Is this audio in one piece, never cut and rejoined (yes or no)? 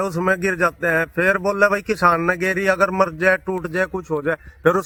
yes